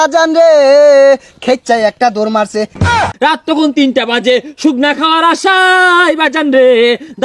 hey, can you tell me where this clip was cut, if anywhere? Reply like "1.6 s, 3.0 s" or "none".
3.1 s